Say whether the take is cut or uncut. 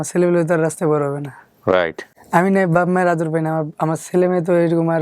uncut